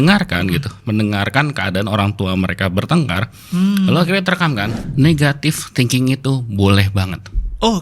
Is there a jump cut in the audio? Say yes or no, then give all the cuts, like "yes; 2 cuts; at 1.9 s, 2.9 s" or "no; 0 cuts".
yes; 1 cut; at 4.8 s